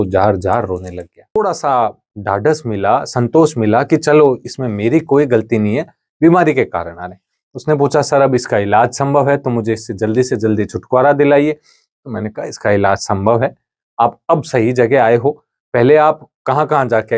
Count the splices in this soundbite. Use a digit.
1